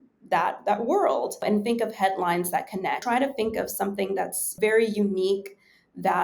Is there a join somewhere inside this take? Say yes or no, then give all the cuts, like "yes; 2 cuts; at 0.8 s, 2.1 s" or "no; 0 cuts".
yes; 3 cuts; at 1.3 s, 3.0 s, 4.5 s